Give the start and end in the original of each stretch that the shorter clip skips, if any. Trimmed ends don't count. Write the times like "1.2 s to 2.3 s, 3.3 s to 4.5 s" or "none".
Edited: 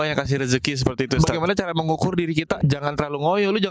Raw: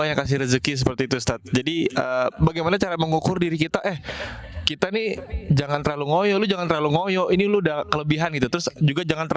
1.2 s to 2.4 s, 3.8 s to 5.4 s